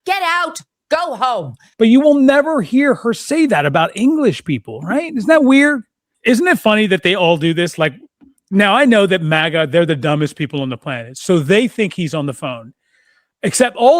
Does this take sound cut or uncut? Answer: cut